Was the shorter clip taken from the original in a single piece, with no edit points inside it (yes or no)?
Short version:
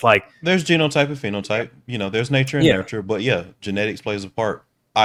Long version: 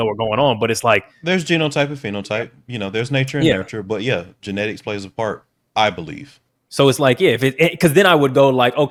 yes